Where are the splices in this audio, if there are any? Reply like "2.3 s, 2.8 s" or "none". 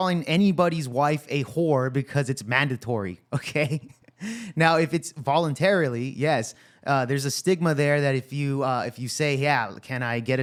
none